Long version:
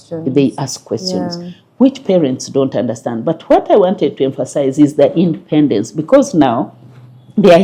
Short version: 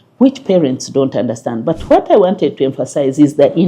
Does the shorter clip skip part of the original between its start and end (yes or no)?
no